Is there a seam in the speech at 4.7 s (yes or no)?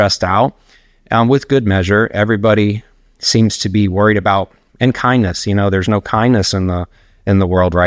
yes